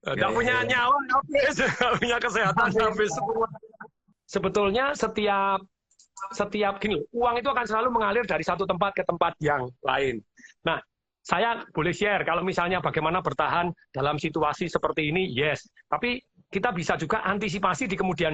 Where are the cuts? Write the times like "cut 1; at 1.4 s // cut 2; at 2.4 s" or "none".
cut 1; at 4.1 s